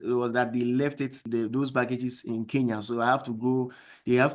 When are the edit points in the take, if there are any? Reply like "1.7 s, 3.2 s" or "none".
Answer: 1.2 s